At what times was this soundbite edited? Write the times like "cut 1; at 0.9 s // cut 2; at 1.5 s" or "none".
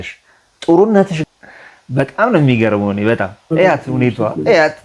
cut 1; at 1.2 s